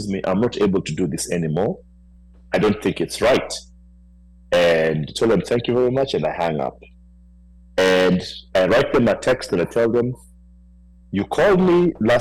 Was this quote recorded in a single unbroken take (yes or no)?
yes